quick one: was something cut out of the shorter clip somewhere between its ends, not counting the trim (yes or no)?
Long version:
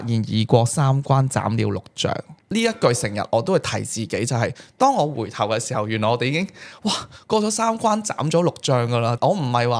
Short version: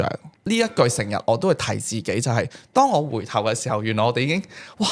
no